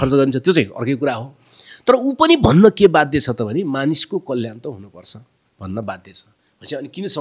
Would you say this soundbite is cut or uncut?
uncut